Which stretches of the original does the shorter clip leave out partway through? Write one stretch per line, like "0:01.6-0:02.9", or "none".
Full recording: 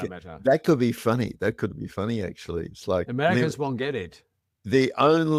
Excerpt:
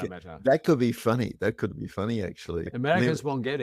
0:02.7-0:03.1